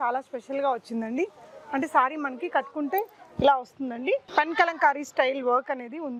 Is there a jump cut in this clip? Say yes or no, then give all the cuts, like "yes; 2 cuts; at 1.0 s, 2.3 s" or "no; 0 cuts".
no; 0 cuts